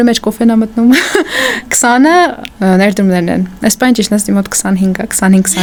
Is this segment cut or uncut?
uncut